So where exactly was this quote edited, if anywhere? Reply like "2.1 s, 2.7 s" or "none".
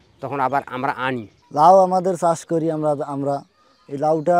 1.4 s